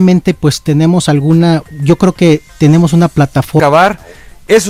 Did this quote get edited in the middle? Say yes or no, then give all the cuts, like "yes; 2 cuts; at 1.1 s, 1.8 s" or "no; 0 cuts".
no; 0 cuts